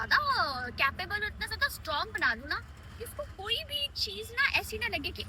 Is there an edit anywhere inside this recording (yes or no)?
no